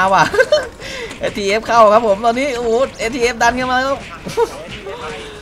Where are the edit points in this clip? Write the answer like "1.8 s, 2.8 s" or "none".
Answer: none